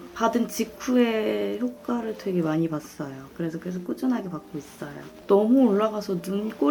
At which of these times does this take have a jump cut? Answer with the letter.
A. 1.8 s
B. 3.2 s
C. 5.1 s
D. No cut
C